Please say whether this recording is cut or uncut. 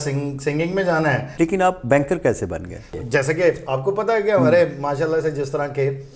cut